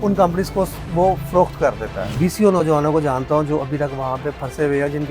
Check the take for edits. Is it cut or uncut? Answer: cut